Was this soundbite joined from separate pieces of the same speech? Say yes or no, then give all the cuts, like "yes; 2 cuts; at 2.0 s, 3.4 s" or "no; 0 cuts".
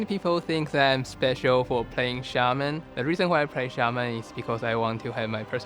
yes; 1 cut; at 2.9 s